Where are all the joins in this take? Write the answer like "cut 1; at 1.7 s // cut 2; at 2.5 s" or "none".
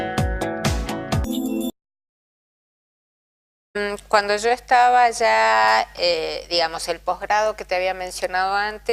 none